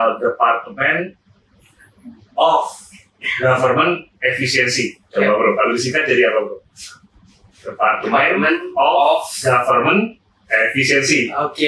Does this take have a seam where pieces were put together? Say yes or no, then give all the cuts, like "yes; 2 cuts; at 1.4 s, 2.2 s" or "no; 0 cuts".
no; 0 cuts